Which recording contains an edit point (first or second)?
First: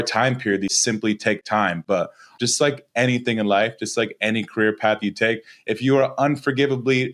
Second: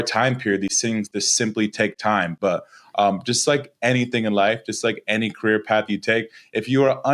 first